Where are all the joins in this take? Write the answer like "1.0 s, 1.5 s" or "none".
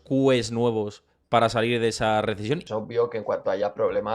2.6 s

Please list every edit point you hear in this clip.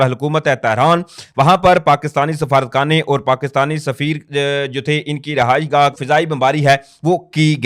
6.0 s

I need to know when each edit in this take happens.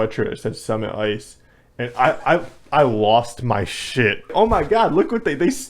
4.3 s

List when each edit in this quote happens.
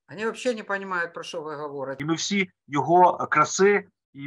1.9 s

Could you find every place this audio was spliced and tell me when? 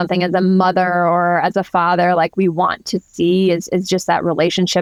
none

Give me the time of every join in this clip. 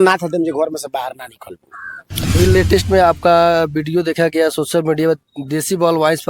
2.3 s

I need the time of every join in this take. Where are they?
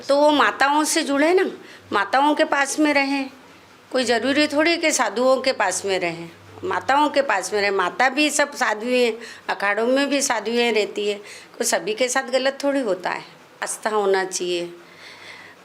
13.7 s

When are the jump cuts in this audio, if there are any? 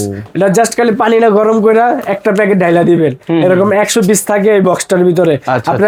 none

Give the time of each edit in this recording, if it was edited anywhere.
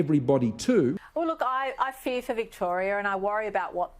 1.0 s

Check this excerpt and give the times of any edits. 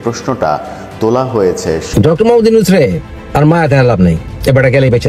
1.9 s

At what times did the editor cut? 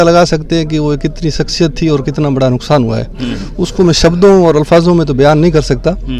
none

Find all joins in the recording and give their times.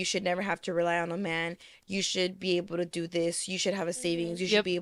none

